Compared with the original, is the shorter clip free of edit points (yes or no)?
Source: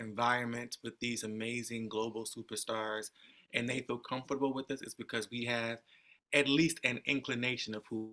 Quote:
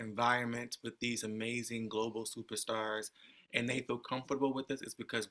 yes